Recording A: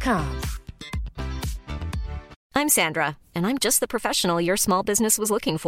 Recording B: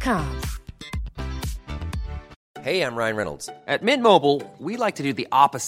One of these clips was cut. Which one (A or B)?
B